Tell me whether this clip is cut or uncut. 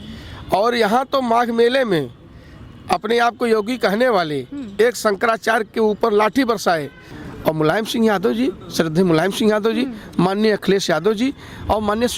cut